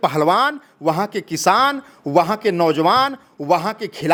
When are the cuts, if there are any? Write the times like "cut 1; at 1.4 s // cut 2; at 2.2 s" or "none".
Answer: none